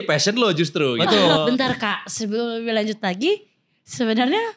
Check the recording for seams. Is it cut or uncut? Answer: cut